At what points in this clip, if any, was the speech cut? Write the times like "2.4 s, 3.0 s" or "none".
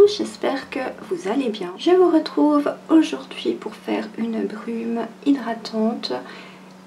1.7 s